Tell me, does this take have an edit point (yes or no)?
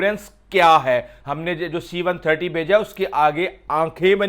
yes